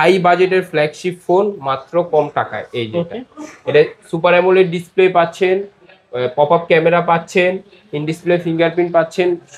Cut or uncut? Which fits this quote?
uncut